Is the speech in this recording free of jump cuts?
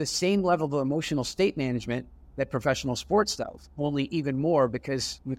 yes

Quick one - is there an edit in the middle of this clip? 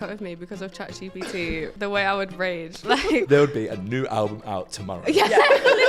yes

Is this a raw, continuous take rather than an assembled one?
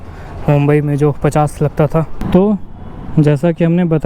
no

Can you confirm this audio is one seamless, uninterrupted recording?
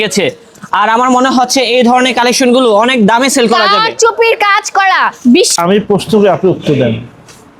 no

